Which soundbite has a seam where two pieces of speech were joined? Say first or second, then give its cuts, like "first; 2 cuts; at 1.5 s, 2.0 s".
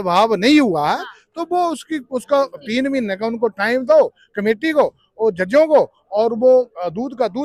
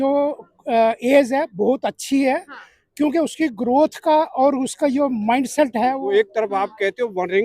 second; 1 cut; at 6.0 s